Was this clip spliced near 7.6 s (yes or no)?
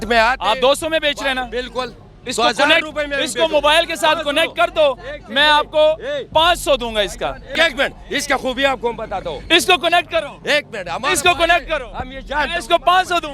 yes